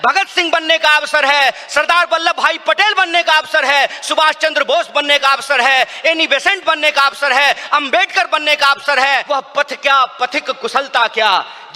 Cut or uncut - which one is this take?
cut